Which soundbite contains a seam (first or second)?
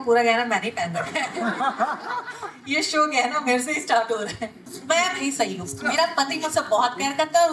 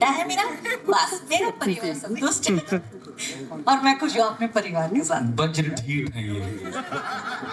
first